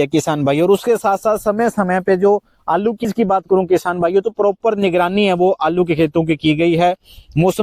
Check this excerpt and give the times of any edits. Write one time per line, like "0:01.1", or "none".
0:03.0

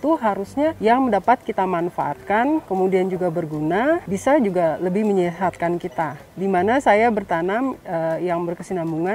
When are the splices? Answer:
0:00.8
0:02.7
0:04.1
0:06.2

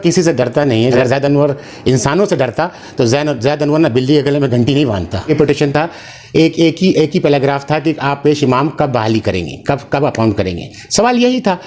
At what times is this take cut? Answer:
0:01.0
0:05.3

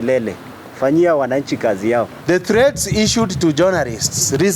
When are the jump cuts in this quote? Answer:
0:02.1

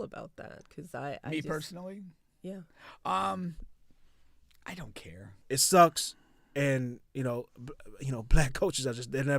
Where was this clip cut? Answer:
0:05.3

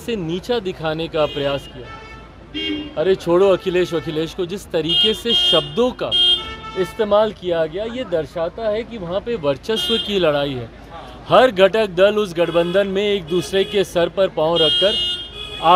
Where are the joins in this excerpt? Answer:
none

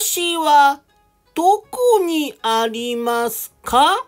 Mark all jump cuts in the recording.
none

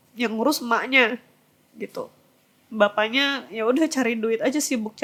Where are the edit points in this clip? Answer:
none

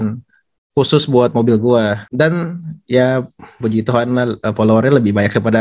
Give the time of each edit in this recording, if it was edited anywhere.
0:02.0

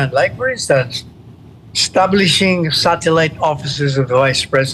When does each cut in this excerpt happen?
none

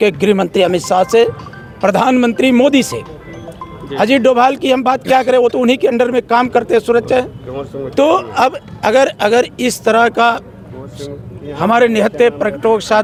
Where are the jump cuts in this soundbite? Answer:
none

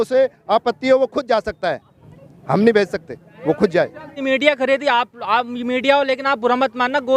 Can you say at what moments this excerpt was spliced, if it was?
0:04.2

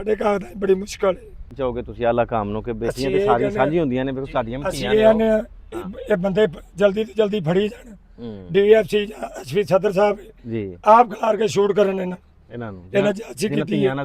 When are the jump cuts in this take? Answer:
none

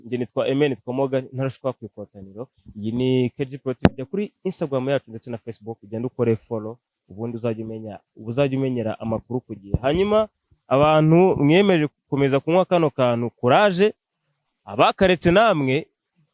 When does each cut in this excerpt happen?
none

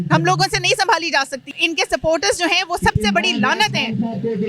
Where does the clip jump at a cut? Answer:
0:01.4

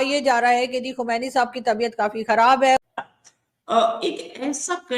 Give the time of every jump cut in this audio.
0:02.8

